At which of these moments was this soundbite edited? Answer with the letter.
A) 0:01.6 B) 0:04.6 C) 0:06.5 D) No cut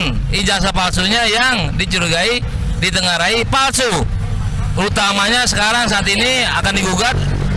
D